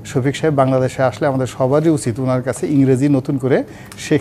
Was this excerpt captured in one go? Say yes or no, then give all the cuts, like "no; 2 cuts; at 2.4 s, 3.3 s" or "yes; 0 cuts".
yes; 0 cuts